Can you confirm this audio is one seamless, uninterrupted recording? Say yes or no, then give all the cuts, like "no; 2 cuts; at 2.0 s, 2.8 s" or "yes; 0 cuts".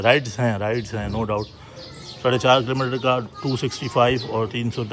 yes; 0 cuts